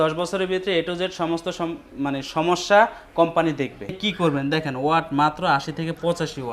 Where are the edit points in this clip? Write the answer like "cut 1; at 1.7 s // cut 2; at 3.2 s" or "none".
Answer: cut 1; at 4.0 s